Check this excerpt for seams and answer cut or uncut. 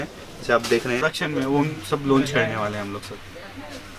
cut